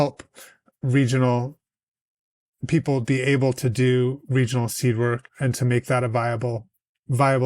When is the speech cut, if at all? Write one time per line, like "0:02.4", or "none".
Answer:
none